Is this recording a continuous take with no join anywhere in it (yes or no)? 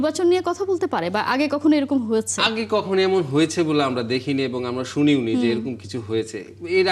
yes